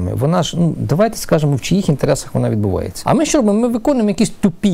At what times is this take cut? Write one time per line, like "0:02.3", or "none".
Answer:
0:02.9